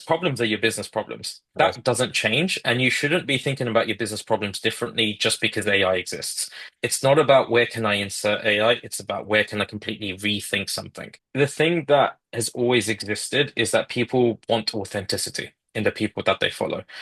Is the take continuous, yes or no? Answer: no